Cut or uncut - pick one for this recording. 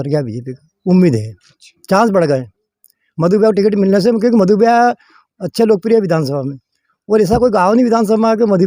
uncut